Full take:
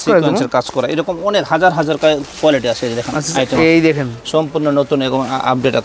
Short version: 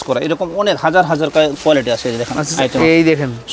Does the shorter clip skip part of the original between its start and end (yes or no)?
yes